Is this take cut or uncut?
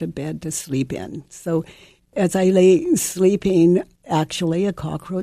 cut